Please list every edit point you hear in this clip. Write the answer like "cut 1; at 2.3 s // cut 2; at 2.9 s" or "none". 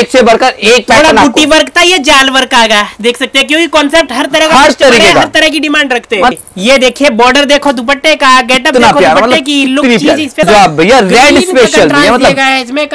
cut 1; at 6.3 s // cut 2; at 10.4 s